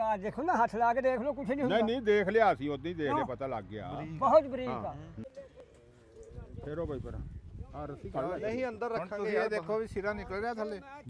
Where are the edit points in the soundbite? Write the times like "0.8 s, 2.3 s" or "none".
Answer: 5.2 s